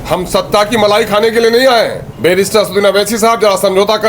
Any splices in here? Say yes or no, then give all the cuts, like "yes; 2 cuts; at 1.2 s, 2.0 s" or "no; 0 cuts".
yes; 1 cut; at 2.0 s